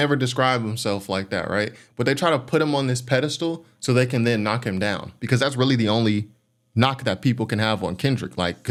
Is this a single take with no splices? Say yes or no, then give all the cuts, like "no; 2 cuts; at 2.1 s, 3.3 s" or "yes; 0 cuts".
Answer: yes; 0 cuts